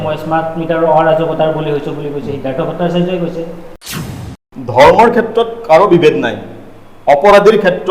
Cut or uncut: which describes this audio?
cut